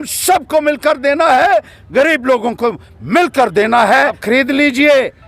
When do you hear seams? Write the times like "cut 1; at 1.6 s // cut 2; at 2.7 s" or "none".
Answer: cut 1; at 4.2 s